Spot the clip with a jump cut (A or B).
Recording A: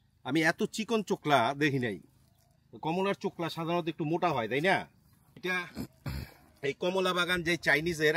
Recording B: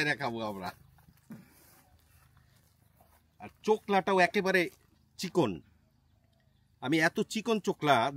A